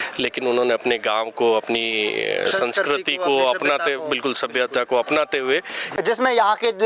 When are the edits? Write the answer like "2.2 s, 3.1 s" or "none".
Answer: 5.8 s